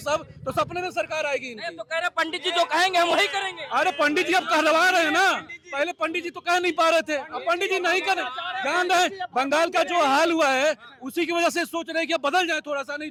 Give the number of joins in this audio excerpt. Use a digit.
0